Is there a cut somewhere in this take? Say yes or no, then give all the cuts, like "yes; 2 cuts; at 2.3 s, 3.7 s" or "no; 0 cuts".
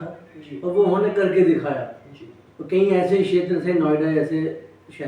no; 0 cuts